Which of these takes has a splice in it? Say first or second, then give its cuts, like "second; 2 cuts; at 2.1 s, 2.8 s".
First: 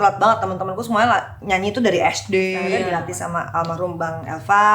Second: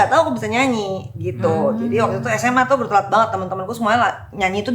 first; 1 cut; at 2.8 s